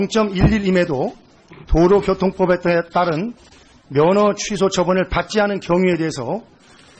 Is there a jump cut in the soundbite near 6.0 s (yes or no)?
yes